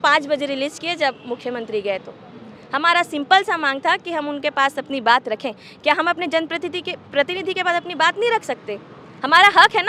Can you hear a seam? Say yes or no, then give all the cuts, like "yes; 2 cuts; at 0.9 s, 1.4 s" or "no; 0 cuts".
no; 0 cuts